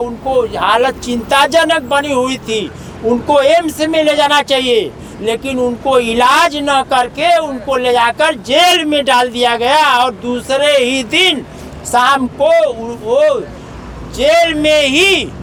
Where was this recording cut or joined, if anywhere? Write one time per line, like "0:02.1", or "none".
none